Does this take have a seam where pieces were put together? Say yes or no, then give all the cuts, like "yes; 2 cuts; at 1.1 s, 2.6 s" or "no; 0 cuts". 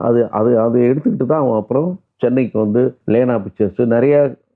yes; 1 cut; at 3.0 s